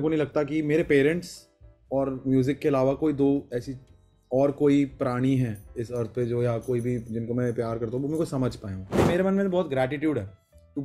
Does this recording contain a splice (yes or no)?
yes